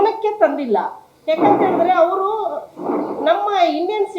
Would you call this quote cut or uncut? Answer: uncut